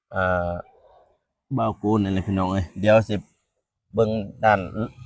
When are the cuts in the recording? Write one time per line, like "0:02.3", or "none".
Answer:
none